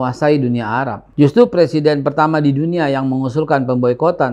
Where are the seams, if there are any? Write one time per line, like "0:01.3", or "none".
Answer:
0:01.0